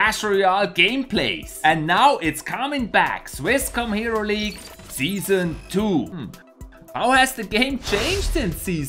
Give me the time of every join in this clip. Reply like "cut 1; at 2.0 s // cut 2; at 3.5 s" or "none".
cut 1; at 4.1 s // cut 2; at 7.8 s